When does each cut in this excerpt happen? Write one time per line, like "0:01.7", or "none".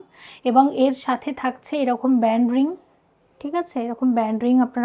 none